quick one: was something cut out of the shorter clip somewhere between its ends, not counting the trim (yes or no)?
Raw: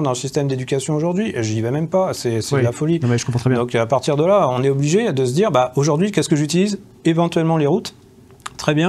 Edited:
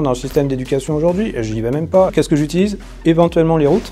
yes